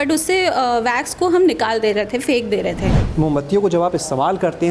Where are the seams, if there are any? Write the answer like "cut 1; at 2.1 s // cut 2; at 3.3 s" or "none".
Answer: cut 1; at 3.0 s